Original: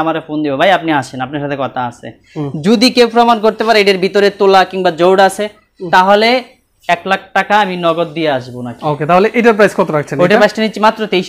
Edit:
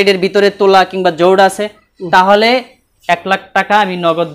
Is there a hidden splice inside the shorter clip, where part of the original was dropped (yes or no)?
no